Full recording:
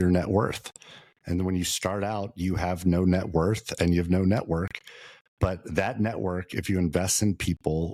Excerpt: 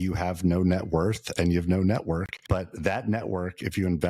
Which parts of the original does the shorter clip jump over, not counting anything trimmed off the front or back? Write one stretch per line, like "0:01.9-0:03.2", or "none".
0:04.8-0:05.3